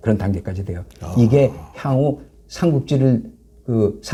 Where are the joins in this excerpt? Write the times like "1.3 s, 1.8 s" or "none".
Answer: none